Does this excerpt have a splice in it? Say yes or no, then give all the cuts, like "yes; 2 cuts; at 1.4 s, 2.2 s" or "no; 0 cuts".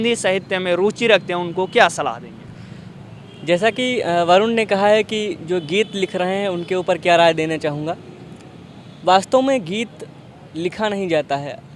no; 0 cuts